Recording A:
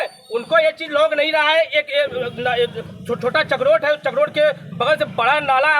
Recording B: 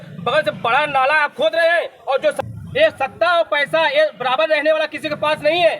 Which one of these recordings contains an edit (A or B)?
B